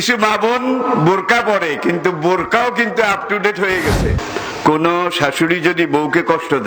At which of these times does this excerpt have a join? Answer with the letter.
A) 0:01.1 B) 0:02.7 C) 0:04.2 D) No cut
C